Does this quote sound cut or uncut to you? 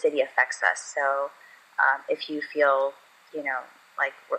uncut